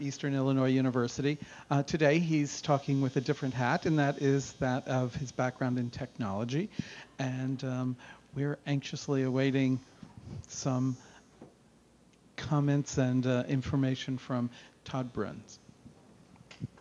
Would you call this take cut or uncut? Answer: cut